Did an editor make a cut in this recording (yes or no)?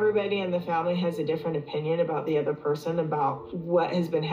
no